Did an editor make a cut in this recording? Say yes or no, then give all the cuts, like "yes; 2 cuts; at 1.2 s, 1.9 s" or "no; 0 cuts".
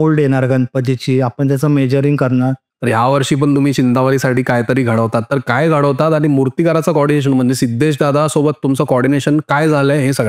yes; 1 cut; at 2.7 s